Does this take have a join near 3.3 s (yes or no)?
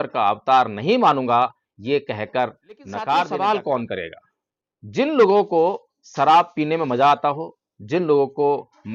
yes